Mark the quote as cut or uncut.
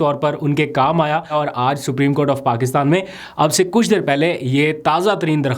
cut